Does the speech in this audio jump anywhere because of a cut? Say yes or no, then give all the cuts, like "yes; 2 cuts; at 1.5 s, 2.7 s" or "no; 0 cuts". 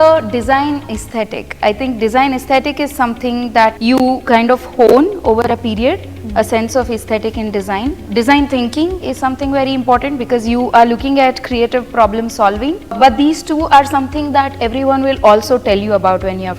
yes; 3 cuts; at 3.8 s, 8.0 s, 13.0 s